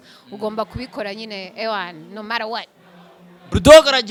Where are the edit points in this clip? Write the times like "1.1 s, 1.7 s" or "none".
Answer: none